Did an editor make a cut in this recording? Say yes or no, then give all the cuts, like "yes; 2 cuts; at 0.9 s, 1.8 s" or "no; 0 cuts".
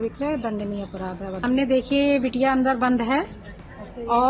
yes; 1 cut; at 1.4 s